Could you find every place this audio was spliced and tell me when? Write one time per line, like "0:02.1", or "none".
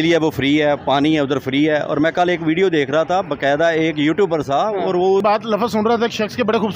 0:05.2